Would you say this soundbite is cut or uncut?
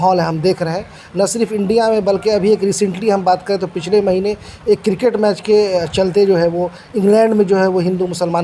uncut